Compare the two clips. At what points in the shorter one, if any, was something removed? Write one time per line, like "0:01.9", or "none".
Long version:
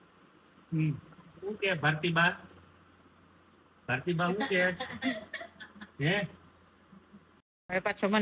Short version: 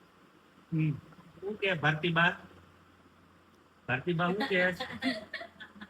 none

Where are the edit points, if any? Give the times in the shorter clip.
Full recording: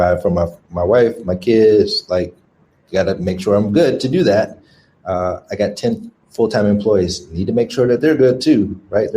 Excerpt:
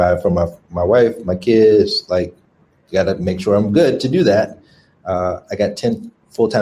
none

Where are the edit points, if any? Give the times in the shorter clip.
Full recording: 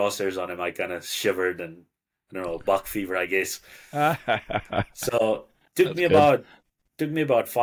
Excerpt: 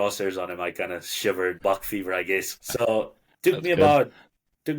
0:01.6
0:02.6

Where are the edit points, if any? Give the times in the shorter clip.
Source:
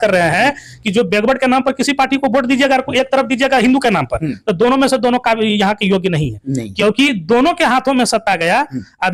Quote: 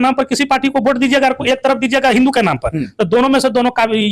none

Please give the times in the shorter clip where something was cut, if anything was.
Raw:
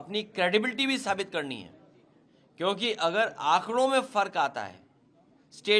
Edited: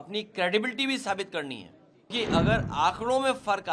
0:02.1

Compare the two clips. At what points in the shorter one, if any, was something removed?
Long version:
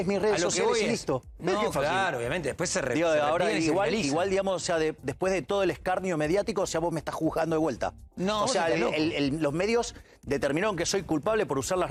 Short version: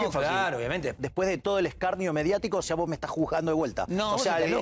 0:01.0
0:03.8

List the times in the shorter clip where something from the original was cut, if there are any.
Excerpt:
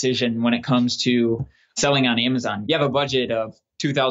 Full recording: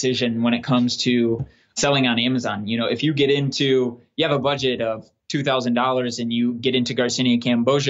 0:02.6

